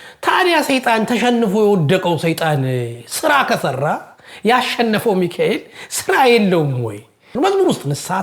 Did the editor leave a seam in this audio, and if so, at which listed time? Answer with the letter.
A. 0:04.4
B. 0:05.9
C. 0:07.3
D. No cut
C